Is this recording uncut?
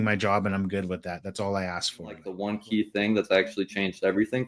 no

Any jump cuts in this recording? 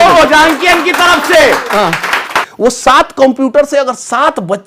yes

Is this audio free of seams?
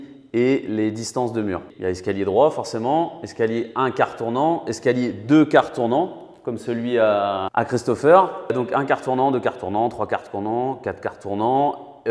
no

